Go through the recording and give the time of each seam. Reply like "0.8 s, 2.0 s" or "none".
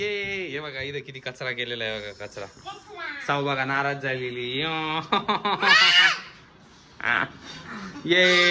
none